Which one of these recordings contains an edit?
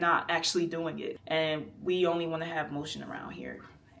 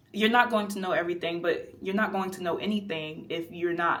first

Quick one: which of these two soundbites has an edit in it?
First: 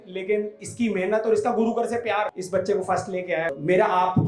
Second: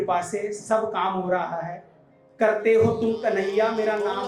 first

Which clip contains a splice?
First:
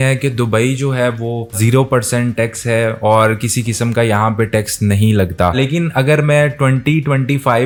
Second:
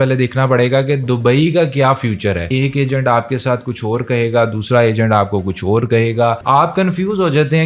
second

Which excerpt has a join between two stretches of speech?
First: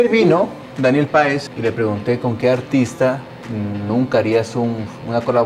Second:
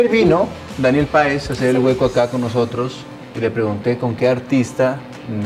first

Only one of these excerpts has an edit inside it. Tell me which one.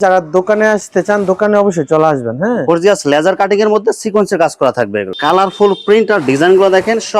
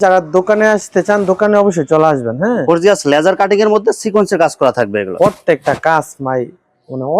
first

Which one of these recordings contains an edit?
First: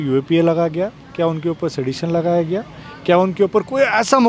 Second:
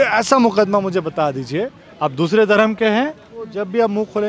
second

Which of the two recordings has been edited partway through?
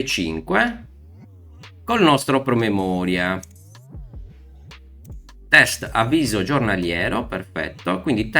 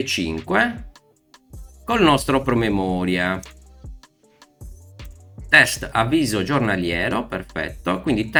first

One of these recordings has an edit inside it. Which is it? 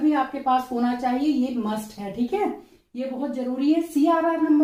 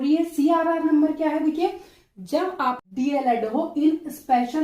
second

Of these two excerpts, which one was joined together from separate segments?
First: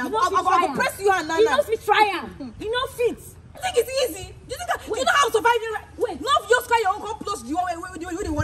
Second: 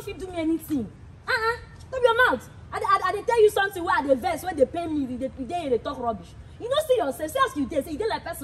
first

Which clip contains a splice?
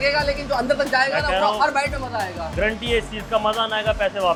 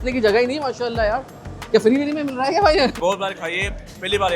second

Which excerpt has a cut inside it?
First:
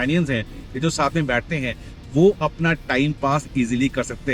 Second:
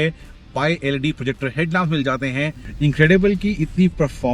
second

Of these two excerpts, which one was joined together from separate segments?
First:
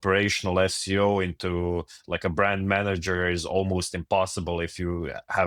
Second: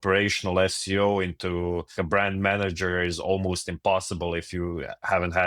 second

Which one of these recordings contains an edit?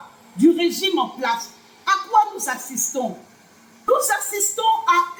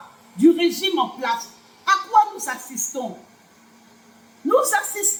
first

